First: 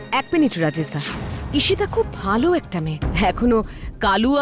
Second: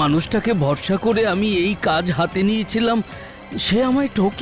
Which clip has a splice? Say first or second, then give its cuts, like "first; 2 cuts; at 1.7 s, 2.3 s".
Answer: first; 1 cut; at 3.0 s